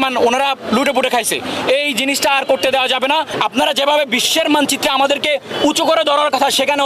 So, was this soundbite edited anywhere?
yes; 1 cut; at 3.3 s

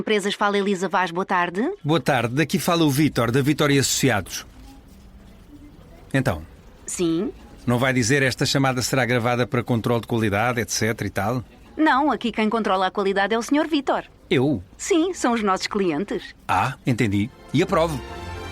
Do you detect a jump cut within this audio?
no; 0 cuts

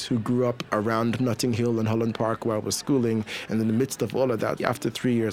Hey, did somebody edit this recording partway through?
yes; 1 cut; at 3.3 s

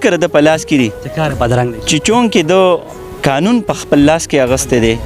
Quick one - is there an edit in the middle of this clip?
no; 0 cuts

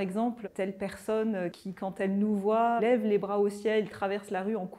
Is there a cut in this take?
yes; 1 cut; at 2.8 s

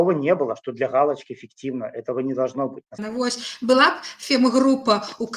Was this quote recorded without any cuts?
no; 1 cut; at 3.0 s

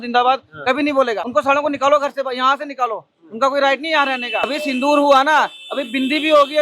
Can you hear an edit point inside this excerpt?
yes; 1 cut; at 4.5 s

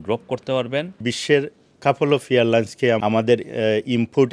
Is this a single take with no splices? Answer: no; 2 cuts; at 1.1 s, 3.0 s

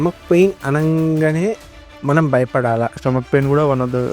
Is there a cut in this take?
yes; 1 cut; at 3.0 s

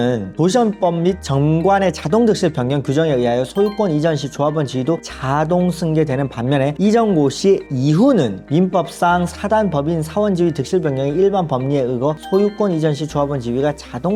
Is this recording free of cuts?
yes; 0 cuts

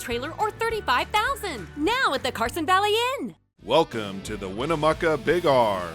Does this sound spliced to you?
yes; 1 cut; at 3.4 s

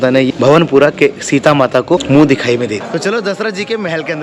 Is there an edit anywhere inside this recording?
yes; 1 cut; at 2.8 s

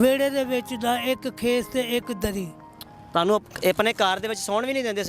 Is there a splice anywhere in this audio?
no; 0 cuts

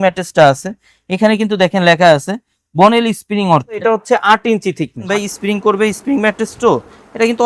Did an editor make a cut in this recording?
yes; 2 cuts; at 3.8 s, 5.1 s

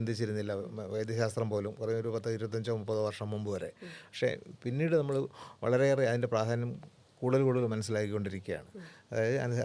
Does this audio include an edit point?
no; 0 cuts

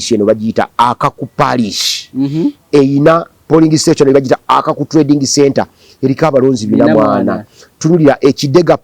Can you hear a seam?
no; 0 cuts

